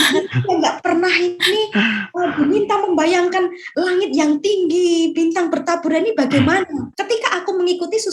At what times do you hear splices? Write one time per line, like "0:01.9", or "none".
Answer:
0:06.9